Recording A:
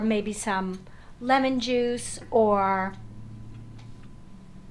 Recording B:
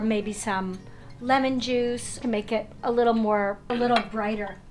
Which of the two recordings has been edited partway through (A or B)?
B